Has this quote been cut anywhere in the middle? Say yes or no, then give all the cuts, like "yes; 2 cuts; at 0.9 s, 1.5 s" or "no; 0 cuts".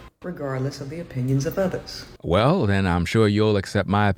no; 0 cuts